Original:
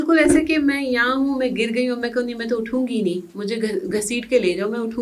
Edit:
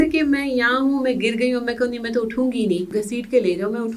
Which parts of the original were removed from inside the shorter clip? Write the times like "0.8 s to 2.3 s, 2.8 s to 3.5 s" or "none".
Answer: 3.2 s to 3.9 s